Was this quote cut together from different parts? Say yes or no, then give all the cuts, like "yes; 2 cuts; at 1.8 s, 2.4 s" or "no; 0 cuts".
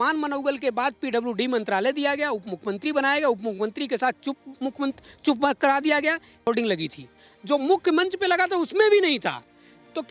yes; 1 cut; at 6.5 s